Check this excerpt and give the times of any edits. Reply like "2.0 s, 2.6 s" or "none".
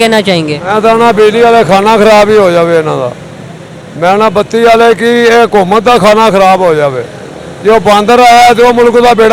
none